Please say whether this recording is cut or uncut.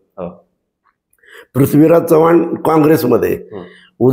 uncut